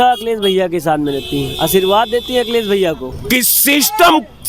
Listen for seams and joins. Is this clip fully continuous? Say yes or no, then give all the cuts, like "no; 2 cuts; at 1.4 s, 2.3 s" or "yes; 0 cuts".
no; 1 cut; at 3.1 s